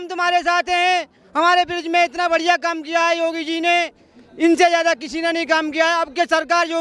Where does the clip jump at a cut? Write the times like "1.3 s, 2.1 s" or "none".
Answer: none